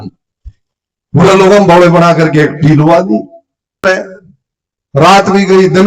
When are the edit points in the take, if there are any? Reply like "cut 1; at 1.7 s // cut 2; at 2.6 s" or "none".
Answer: cut 1; at 3.8 s